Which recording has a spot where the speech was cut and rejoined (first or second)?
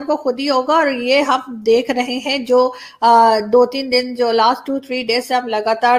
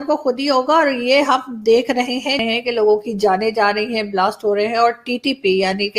second